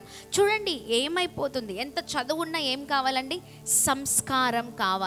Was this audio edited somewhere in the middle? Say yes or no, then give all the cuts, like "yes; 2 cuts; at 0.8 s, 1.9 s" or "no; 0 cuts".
no; 0 cuts